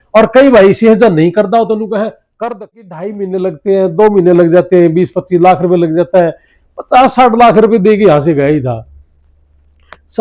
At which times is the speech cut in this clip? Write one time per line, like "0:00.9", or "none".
0:02.7